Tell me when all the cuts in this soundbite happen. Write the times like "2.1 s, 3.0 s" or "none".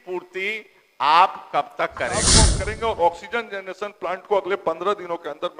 2.4 s